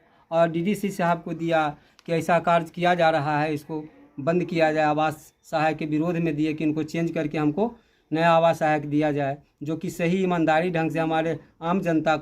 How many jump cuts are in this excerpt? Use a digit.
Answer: 0